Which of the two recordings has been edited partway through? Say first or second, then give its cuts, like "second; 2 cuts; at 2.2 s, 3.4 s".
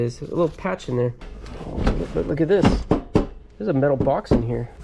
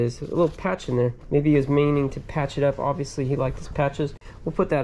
first; 1 cut; at 1.2 s